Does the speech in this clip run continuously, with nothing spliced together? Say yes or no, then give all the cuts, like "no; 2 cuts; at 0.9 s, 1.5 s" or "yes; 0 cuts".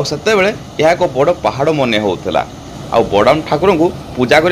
no; 1 cut; at 2.7 s